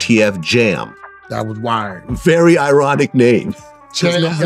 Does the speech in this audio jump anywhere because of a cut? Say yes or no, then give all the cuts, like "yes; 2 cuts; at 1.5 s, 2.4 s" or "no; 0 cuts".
no; 0 cuts